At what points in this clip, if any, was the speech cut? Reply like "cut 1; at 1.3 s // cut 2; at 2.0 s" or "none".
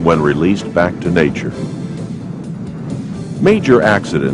cut 1; at 0.9 s